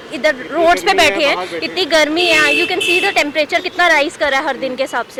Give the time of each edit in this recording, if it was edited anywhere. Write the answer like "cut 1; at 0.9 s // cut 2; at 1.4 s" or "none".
none